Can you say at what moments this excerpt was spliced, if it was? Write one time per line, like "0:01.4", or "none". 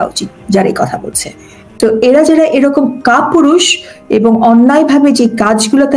0:01.6